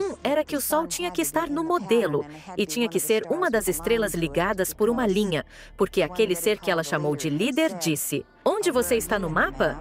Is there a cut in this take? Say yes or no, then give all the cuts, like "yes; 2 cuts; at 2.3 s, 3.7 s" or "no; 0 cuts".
no; 0 cuts